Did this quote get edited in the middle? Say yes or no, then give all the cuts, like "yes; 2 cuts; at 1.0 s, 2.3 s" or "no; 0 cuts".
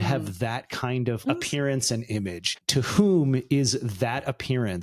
yes; 2 cuts; at 1.2 s, 2.6 s